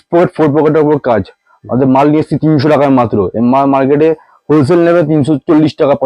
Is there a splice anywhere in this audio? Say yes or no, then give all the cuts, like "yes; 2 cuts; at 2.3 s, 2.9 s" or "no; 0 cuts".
no; 0 cuts